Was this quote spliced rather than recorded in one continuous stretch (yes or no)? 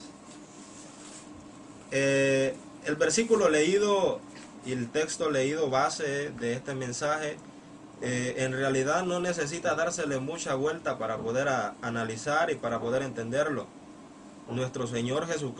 yes